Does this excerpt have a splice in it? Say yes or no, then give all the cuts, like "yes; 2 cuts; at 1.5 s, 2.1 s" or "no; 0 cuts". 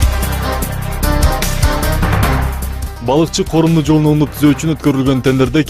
yes; 1 cut; at 2.3 s